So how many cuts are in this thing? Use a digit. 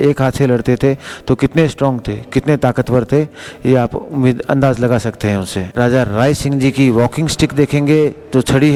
0